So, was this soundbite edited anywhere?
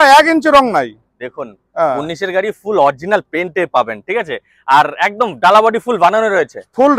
no; 0 cuts

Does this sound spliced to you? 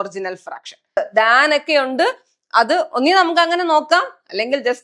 yes; 1 cut; at 1.0 s

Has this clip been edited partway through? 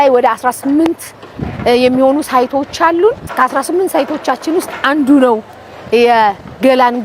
no; 0 cuts

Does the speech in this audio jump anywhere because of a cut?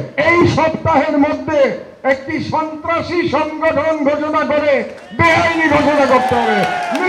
no; 0 cuts

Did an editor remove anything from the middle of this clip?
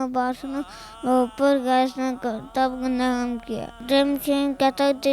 yes; 1 cut; at 3.8 s

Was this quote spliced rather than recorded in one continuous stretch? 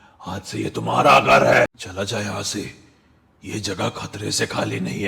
yes; 1 cut; at 1.8 s

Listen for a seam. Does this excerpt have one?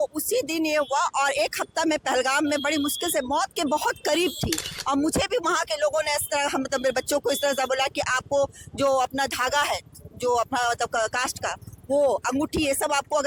no; 0 cuts

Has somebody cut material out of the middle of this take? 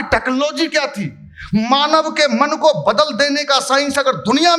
no; 0 cuts

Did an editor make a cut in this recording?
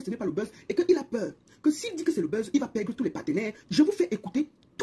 yes; 1 cut; at 3.6 s

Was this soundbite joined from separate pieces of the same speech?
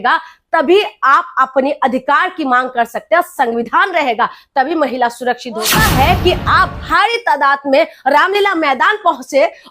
yes; 1 cut; at 5.8 s

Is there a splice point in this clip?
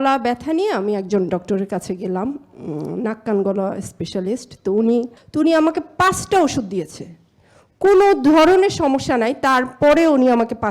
yes; 1 cut; at 5.2 s

